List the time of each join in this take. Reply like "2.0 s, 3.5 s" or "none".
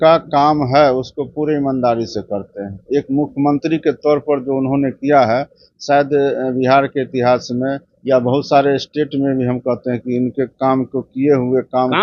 none